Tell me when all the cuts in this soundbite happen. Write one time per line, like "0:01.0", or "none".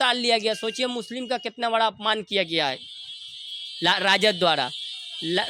none